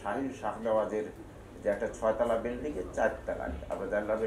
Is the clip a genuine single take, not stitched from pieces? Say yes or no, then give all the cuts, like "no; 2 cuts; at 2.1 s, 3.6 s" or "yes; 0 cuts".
yes; 0 cuts